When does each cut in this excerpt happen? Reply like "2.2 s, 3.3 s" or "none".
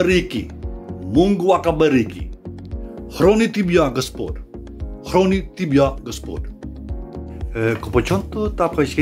none